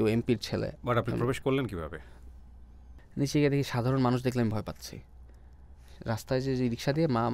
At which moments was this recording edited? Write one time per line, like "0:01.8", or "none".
0:02.8